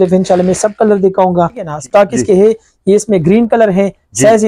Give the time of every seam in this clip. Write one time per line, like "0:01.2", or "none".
0:01.7